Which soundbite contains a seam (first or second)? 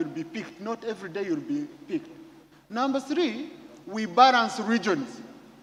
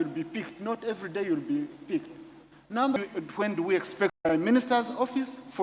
second